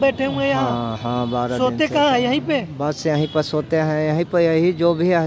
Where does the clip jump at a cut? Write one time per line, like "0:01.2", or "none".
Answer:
none